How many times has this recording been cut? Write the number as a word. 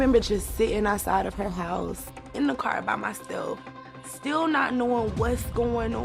one